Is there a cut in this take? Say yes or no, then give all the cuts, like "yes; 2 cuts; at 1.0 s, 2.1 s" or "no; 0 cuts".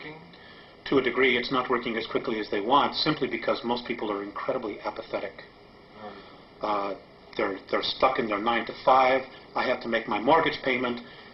no; 0 cuts